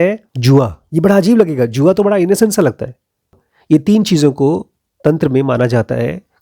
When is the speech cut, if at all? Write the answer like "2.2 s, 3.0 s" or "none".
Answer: 3.4 s